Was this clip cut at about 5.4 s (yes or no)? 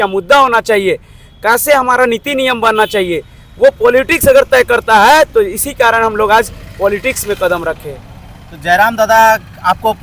no